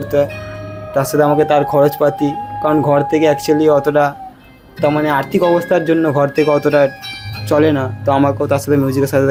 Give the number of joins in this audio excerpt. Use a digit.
0